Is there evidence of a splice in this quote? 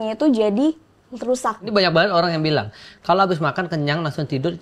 yes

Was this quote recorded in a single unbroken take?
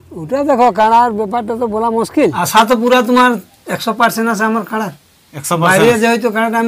no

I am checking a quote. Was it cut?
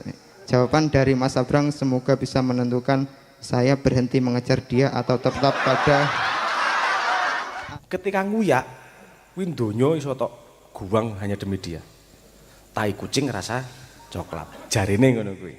yes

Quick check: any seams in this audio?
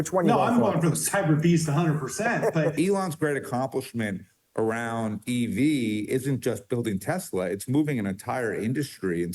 yes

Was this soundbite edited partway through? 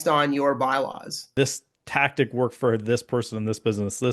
yes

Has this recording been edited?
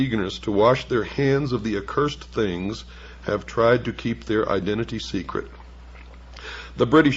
no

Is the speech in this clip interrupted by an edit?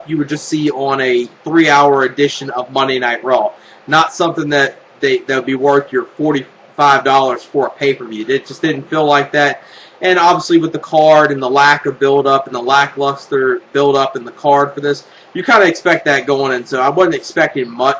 yes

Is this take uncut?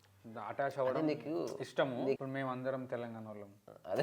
no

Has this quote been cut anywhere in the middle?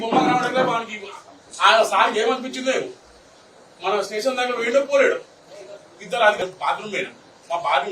yes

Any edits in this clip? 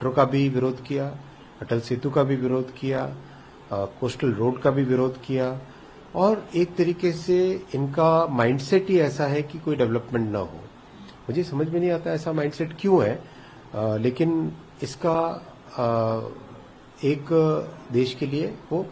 no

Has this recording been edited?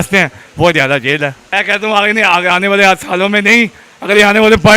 yes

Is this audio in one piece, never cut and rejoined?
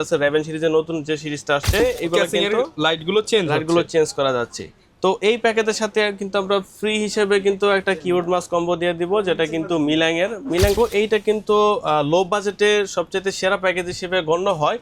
no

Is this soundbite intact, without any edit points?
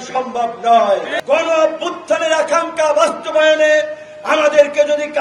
no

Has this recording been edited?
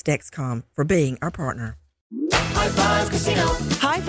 yes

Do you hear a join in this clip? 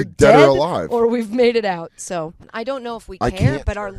yes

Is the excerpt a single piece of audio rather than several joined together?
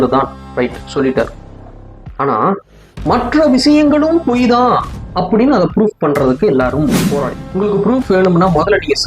no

